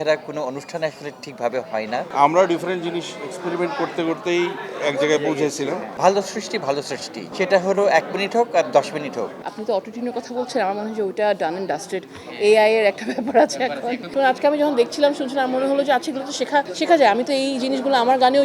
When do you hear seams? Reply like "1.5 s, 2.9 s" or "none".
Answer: 2.1 s, 5.9 s, 9.4 s, 14.0 s